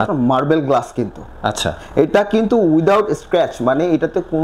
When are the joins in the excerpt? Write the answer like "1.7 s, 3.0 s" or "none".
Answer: none